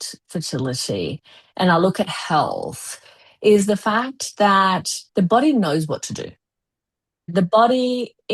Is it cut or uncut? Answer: cut